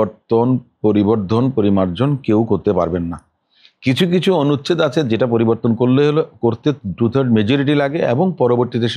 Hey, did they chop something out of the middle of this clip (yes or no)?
no